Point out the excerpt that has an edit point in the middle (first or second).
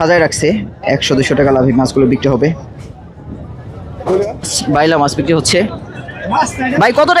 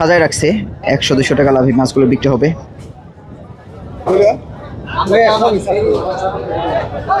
first